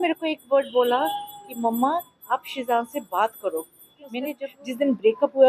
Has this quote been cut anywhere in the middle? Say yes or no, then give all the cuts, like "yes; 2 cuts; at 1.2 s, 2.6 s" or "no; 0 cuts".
yes; 1 cut; at 4.3 s